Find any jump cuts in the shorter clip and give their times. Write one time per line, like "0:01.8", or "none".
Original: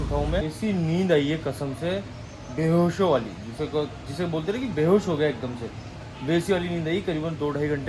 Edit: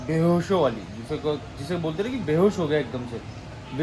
none

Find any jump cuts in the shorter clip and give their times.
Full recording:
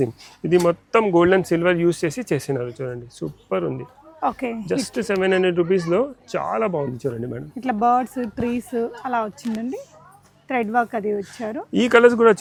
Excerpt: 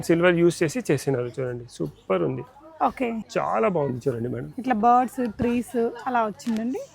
0:03.2

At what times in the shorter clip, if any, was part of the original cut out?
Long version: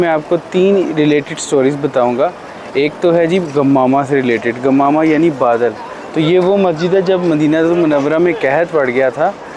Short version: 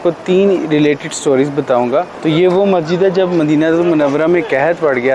0:02.1

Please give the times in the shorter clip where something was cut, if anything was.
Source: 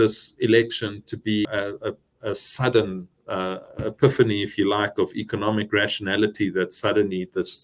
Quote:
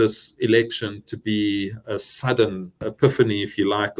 0:01.6
0:02.7

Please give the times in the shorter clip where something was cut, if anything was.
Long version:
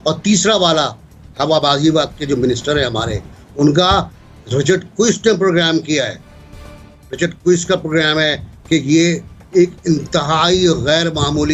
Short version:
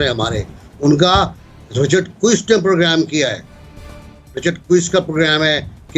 none

